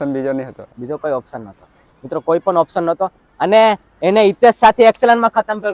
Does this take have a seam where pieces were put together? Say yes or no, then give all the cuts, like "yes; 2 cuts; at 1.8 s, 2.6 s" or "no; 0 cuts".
no; 0 cuts